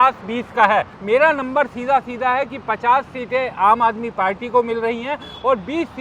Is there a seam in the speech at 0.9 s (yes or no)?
yes